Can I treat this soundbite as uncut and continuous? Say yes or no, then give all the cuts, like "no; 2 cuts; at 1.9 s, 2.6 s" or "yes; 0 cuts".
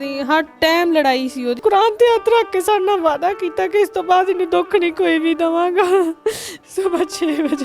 no; 2 cuts; at 1.6 s, 6.5 s